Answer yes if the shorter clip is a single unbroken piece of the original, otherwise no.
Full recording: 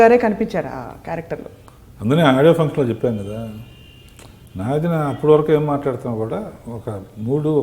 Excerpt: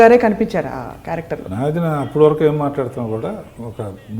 no